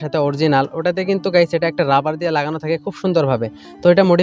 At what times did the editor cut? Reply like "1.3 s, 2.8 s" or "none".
none